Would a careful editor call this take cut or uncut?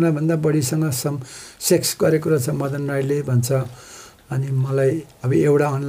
uncut